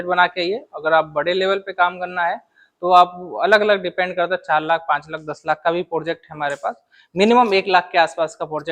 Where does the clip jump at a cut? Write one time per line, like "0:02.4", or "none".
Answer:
none